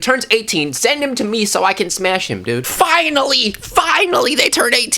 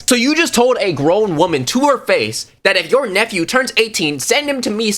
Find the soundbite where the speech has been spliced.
first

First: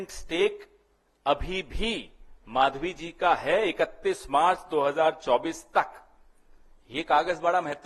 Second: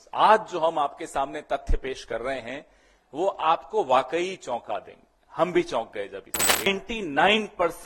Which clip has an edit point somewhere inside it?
second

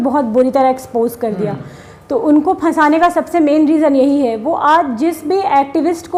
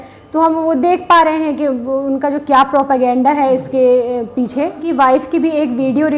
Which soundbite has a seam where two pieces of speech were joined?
second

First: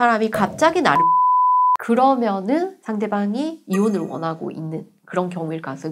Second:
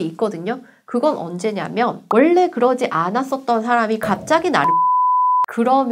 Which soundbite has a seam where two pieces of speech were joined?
first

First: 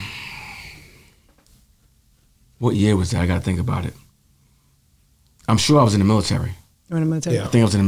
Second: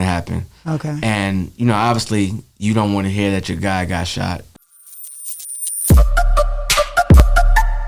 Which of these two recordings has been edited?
second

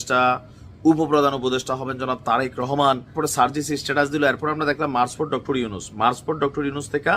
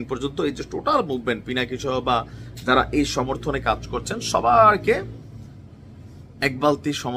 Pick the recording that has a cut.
first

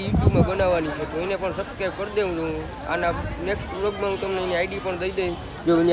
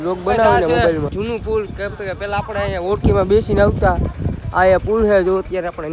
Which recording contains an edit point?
second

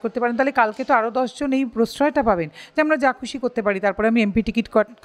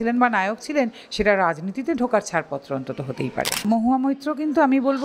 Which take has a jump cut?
second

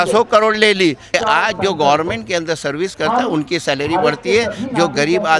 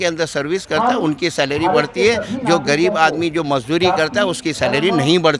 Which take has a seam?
first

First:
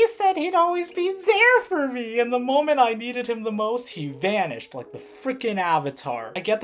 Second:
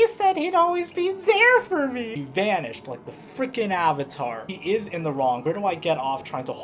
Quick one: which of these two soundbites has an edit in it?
second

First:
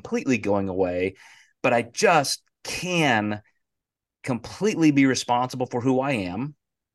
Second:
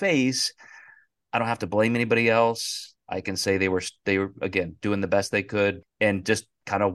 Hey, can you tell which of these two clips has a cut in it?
second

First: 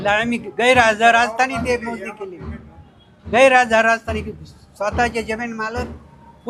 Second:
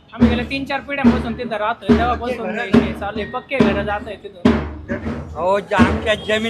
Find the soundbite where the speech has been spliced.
second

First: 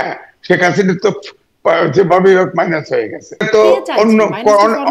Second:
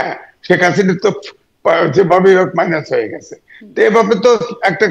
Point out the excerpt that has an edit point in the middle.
first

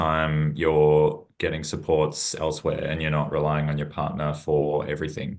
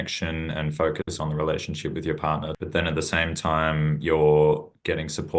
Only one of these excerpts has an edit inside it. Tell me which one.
second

